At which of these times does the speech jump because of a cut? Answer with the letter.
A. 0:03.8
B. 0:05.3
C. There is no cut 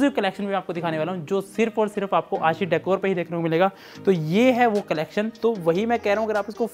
B